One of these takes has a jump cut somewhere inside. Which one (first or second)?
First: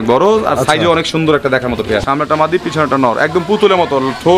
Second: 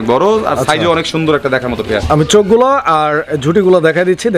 first